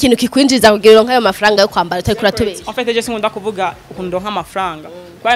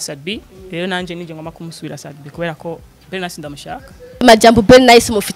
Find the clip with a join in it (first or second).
second